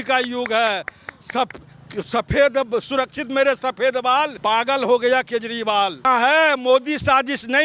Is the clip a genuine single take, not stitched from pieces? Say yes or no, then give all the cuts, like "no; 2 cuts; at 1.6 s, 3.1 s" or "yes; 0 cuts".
no; 2 cuts; at 4.3 s, 6.0 s